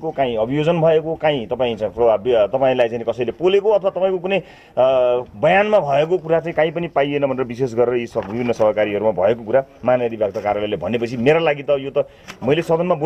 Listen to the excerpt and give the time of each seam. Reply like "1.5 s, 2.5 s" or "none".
none